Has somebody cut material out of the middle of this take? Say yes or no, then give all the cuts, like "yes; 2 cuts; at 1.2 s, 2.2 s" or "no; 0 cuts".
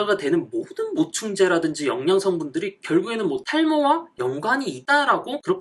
no; 0 cuts